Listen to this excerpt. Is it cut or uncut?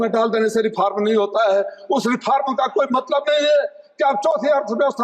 uncut